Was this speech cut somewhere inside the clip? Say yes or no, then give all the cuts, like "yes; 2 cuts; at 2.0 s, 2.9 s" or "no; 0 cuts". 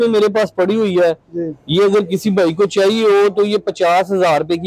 no; 0 cuts